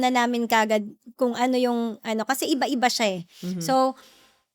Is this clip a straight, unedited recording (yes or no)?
yes